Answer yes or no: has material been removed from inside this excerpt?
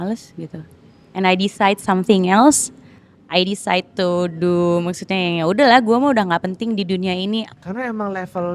yes